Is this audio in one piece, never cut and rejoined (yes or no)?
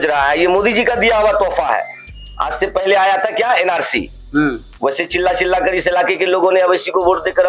yes